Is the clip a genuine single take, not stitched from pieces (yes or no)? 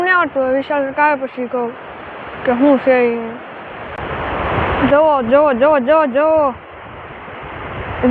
no